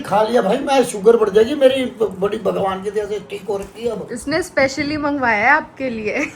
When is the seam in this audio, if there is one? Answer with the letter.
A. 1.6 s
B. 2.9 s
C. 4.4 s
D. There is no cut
D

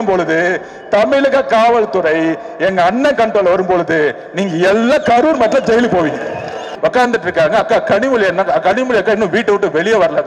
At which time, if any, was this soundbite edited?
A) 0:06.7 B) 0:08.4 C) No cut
A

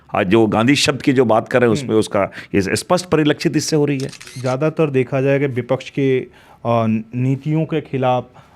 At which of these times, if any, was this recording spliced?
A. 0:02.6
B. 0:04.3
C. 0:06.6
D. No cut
B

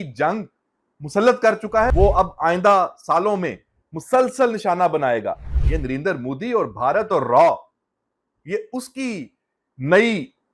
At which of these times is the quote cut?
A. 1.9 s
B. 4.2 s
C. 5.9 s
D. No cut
A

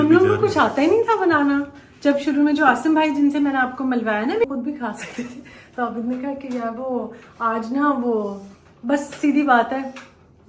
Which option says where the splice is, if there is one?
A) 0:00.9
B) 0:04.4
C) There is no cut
B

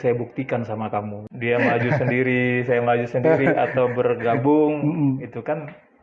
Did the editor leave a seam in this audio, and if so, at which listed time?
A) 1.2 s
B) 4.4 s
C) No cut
A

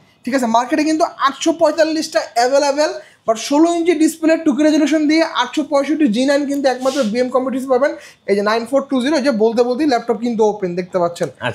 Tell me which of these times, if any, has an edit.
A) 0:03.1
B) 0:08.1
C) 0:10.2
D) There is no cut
B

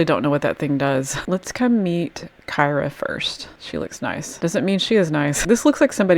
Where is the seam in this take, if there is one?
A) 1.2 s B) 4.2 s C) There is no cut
A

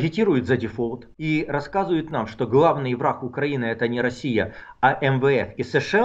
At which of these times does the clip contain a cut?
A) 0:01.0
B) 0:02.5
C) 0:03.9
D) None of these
A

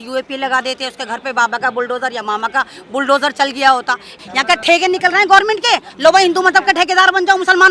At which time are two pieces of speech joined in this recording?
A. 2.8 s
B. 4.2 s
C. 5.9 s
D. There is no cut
B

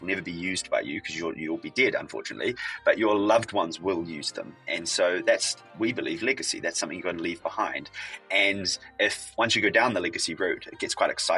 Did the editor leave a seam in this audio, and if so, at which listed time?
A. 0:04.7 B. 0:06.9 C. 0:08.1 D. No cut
D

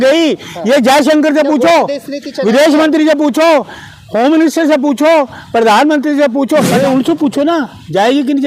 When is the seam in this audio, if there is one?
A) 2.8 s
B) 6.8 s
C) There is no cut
B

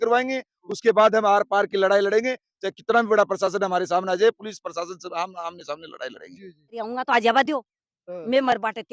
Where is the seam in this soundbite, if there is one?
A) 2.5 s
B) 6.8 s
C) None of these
B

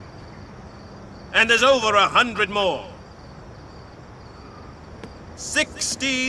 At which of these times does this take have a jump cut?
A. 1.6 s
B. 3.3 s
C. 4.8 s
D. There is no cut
C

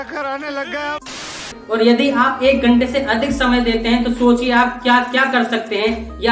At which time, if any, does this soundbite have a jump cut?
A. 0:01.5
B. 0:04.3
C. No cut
A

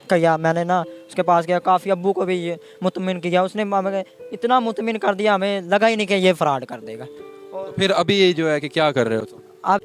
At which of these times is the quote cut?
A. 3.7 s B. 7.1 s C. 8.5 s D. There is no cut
D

